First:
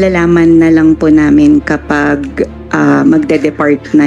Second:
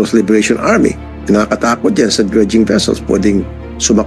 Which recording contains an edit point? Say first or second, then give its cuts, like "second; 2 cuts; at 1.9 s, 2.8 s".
second; 1 cut; at 1.1 s